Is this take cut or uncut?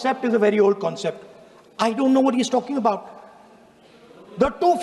uncut